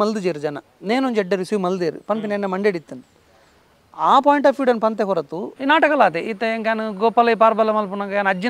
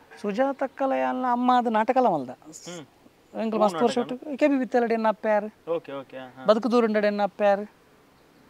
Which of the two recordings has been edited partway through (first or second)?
first